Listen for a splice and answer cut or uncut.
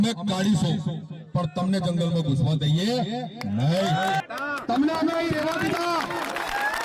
cut